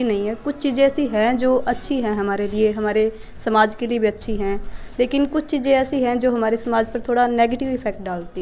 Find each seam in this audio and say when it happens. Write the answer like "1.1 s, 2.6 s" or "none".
none